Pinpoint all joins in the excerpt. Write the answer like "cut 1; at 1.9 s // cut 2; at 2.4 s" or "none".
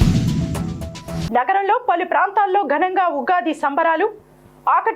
cut 1; at 1.0 s